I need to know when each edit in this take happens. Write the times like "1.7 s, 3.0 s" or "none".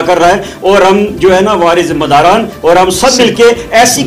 none